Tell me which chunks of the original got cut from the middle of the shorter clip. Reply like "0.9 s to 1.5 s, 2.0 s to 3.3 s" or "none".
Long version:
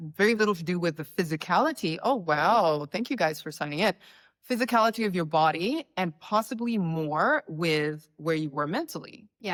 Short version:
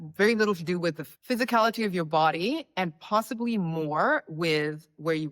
1.0 s to 4.2 s